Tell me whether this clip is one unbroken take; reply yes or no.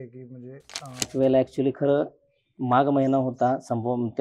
no